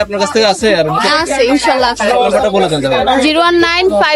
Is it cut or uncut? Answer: uncut